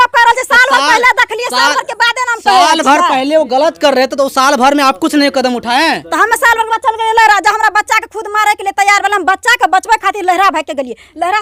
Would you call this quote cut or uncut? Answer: uncut